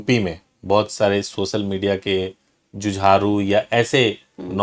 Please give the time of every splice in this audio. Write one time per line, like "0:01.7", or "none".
none